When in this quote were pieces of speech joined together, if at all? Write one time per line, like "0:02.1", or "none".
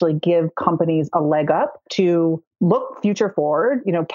0:01.8
0:02.5